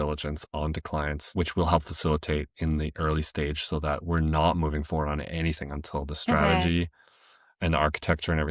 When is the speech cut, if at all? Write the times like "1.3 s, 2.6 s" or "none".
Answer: 1.2 s

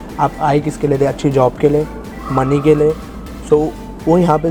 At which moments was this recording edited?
none

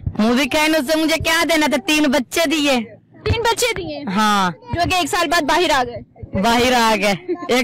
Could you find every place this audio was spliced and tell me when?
none

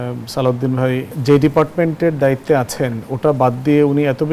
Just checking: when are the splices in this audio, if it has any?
1.1 s

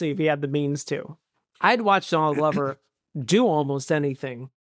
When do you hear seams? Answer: 1.0 s

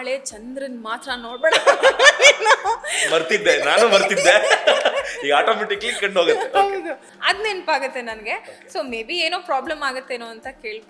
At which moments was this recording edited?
7.1 s

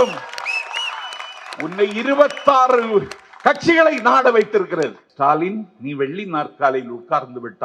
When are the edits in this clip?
5.0 s

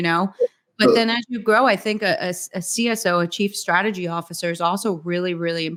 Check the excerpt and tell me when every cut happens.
none

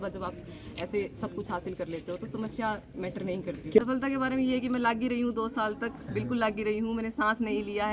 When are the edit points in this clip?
3.8 s

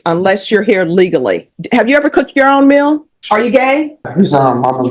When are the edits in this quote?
1.5 s, 3.1 s, 4.1 s

